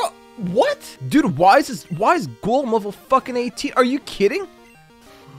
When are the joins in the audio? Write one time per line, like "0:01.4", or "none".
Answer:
0:00.9